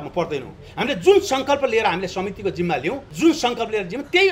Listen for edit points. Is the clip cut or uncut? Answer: cut